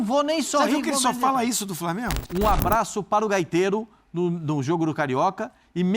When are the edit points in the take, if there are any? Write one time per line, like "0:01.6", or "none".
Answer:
0:02.2